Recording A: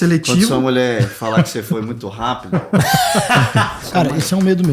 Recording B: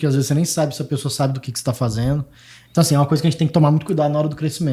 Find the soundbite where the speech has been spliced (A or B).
A